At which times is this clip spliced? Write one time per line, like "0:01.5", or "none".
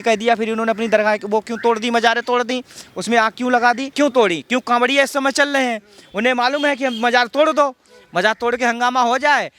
0:03.9